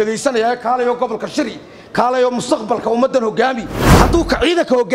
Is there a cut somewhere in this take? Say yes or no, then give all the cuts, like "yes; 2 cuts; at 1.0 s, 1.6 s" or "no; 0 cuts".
yes; 1 cut; at 3.8 s